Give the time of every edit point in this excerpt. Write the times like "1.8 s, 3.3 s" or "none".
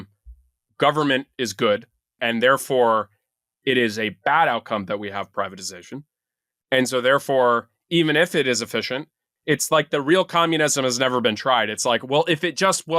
2.2 s, 5.3 s